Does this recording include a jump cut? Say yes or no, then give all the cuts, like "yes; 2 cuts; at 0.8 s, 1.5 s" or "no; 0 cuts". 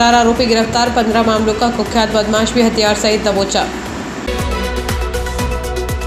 no; 0 cuts